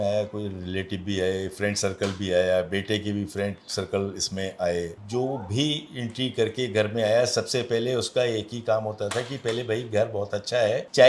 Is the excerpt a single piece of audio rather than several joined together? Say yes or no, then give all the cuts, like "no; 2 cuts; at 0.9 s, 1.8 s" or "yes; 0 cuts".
yes; 0 cuts